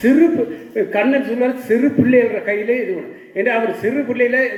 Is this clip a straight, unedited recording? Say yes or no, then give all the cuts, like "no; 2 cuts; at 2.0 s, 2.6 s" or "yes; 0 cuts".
yes; 0 cuts